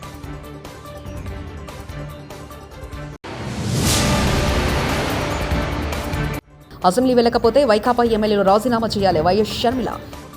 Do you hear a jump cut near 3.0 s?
yes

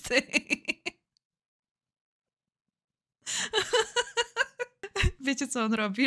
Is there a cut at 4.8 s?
yes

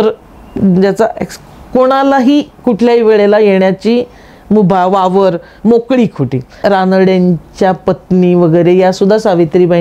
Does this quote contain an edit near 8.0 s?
no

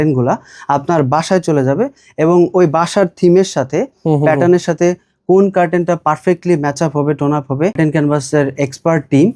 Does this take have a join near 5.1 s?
no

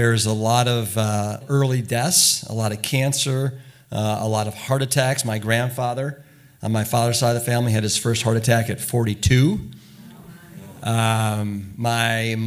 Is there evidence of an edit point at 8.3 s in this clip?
no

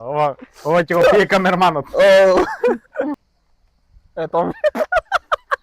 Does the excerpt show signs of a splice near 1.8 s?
no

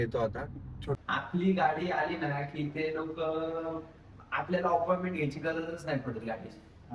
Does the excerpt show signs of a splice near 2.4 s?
no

